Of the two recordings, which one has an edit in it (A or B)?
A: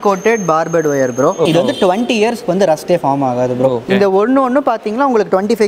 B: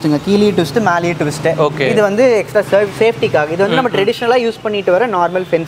A